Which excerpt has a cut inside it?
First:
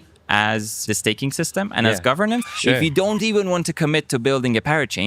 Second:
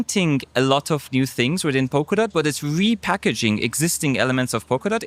first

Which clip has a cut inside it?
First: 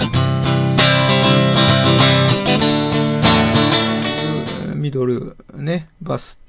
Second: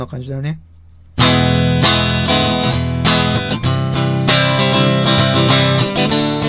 first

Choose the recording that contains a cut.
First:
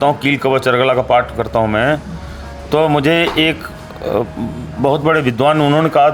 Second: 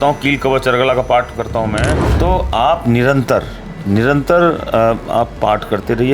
second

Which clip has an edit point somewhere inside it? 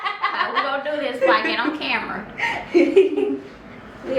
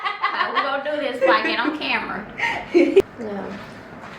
second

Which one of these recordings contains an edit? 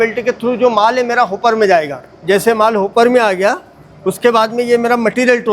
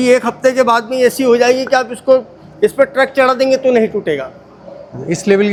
first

